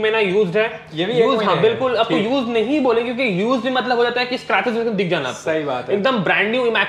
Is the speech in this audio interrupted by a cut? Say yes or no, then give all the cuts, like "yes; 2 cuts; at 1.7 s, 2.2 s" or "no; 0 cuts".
no; 0 cuts